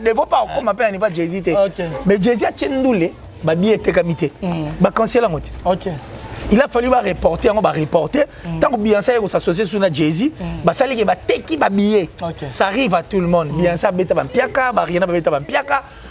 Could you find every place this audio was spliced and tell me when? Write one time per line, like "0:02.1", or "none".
none